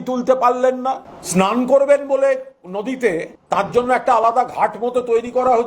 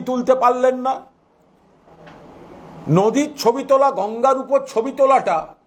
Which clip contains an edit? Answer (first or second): first